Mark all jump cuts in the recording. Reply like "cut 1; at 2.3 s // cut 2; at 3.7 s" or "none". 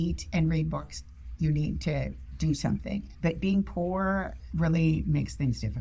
cut 1; at 3.1 s // cut 2; at 4.4 s